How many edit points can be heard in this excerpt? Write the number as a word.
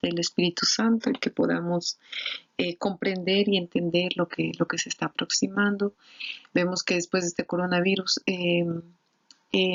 zero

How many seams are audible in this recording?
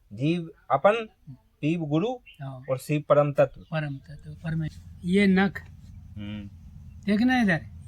one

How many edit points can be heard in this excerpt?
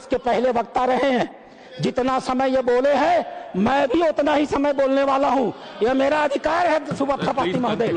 zero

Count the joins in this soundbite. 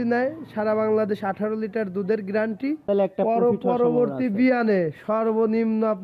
one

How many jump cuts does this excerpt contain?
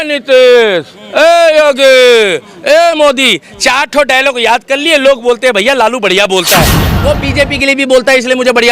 one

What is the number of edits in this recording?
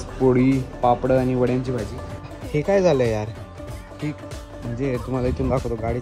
one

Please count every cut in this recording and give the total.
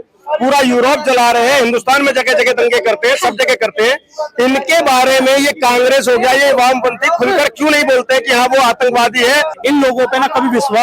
one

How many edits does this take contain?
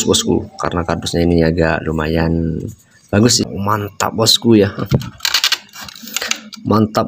one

